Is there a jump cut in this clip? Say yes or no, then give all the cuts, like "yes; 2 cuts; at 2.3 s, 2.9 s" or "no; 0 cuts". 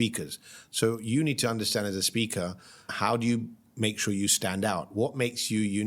yes; 1 cut; at 2.9 s